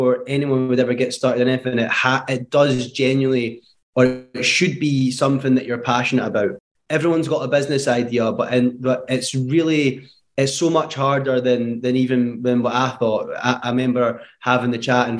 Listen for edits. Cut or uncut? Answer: uncut